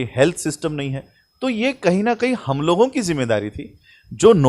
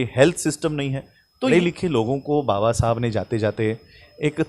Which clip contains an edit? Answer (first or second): second